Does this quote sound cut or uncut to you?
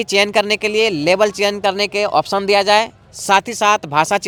uncut